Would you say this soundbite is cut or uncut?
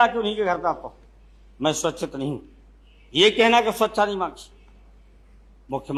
uncut